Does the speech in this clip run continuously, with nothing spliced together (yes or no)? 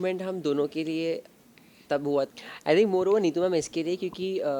no